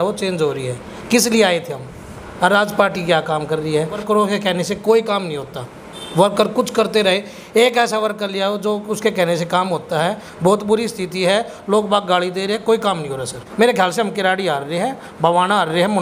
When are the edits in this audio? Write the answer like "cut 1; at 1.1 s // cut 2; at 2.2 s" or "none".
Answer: cut 1; at 4.0 s // cut 2; at 10.3 s // cut 3; at 13.4 s